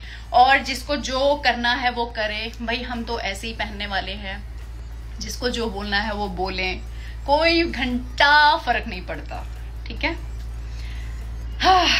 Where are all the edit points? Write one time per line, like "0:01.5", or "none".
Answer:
none